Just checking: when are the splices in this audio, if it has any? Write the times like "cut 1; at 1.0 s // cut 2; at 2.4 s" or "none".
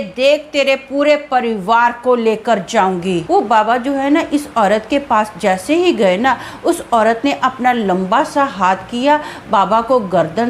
cut 1; at 3.2 s